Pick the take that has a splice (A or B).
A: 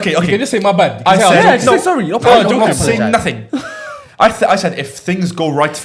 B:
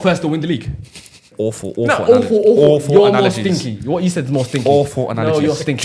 B